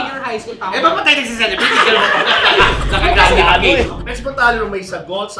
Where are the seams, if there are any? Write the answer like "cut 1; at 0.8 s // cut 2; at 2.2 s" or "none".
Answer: cut 1; at 3.9 s